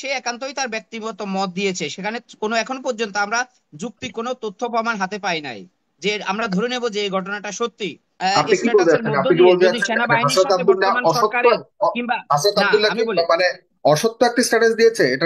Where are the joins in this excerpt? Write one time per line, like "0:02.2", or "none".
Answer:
0:08.0